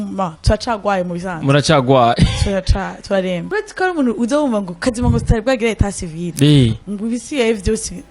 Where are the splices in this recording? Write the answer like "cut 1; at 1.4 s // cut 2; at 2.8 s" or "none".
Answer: cut 1; at 3.4 s